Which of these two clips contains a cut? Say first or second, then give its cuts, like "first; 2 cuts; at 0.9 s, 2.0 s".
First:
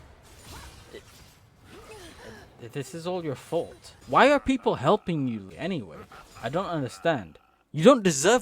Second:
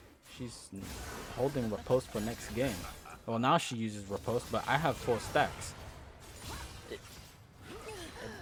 first; 2 cuts; at 4.0 s, 5.5 s